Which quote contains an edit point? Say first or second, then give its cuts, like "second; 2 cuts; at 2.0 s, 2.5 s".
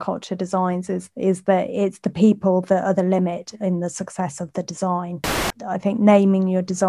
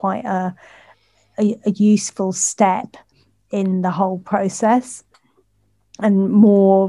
first; 1 cut; at 5.4 s